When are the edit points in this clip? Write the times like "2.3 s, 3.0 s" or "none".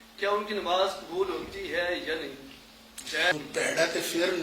3.3 s